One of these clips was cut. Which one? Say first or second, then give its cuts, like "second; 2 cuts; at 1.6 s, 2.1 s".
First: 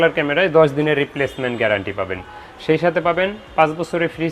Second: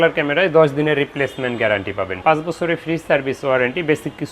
second; 1 cut; at 2.1 s